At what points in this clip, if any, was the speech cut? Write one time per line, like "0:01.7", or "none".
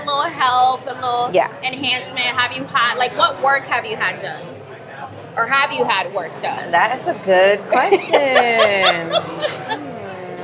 none